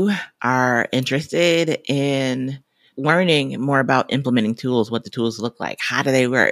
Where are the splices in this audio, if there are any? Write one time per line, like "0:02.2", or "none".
none